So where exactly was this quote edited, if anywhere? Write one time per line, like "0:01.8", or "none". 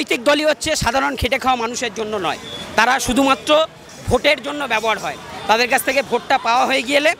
none

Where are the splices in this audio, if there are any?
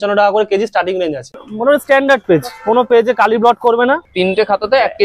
0:01.5
0:04.1

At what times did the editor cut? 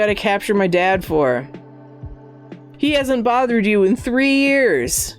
0:02.6

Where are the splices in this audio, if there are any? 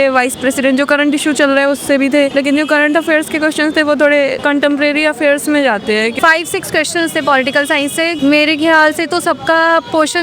0:02.3
0:04.4
0:06.1
0:08.1

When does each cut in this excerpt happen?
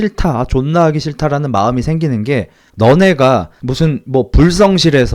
0:02.6
0:03.6

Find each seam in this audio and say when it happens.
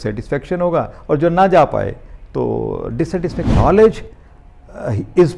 0:03.5

